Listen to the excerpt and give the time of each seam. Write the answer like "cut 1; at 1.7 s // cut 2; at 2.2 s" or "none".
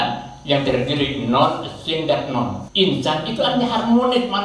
cut 1; at 2.6 s